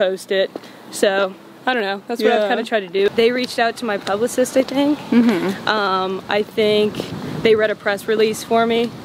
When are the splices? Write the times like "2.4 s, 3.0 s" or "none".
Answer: 3.1 s